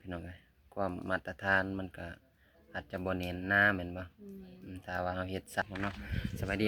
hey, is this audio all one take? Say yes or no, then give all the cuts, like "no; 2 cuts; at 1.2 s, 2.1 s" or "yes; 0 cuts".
no; 1 cut; at 5.6 s